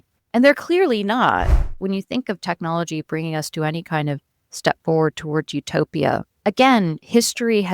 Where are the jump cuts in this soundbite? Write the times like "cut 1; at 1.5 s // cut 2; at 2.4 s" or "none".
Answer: cut 1; at 1.7 s // cut 2; at 6.3 s